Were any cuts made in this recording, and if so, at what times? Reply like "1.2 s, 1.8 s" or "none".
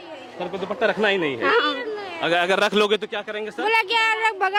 none